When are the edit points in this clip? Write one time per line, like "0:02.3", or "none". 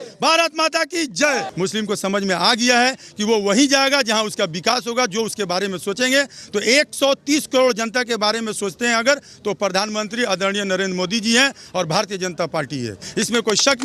0:01.5

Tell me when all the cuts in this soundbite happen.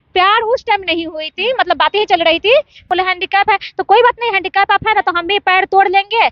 0:02.8

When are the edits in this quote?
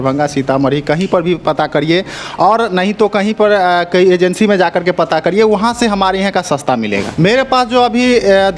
0:07.1

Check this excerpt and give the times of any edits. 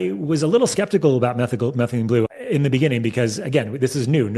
0:02.3

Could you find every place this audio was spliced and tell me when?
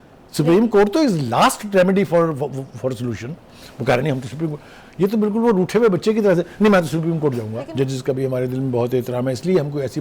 0:07.6

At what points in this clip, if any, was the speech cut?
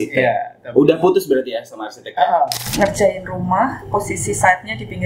0:02.6

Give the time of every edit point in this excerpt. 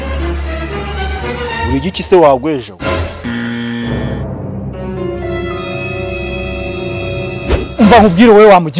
none

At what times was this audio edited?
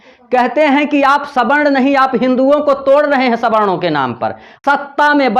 0:04.5

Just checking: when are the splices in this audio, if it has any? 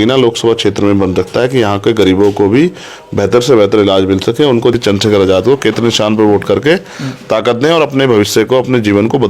0:04.7

